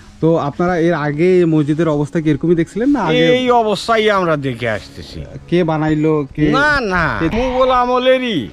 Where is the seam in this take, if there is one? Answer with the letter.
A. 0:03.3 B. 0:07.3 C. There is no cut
B